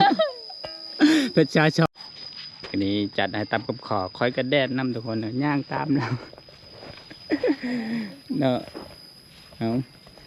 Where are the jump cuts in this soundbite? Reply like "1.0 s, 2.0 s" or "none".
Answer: 1.9 s